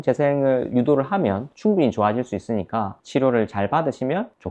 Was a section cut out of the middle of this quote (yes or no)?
yes